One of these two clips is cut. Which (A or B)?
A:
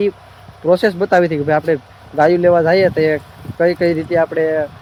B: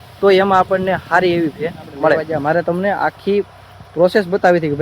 B